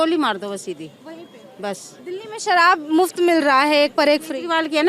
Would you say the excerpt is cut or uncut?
uncut